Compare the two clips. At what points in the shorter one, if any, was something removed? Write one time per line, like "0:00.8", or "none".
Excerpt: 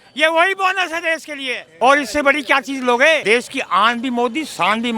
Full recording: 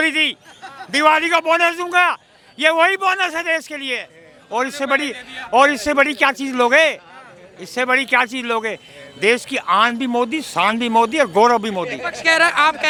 0:01.6
0:03.2

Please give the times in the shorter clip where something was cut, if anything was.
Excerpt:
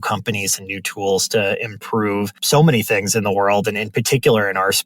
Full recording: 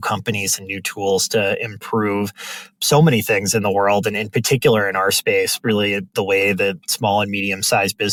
0:02.4

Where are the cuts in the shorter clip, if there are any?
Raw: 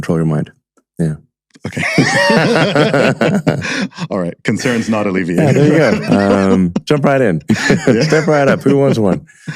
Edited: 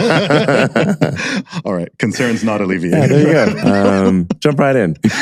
none

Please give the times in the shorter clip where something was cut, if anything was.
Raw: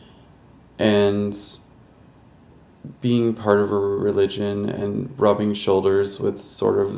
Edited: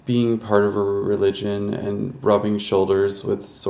none

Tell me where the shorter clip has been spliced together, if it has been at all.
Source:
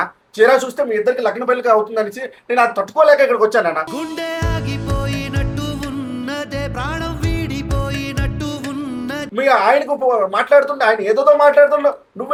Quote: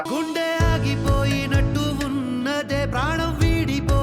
none

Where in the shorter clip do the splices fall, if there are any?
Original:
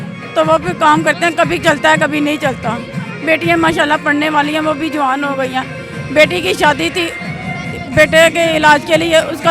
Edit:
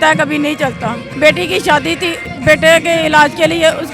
0:01.0
0:02.3

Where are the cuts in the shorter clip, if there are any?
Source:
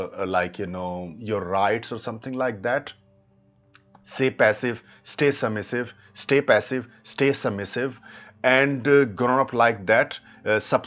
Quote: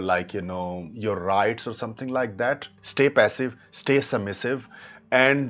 0:02.8

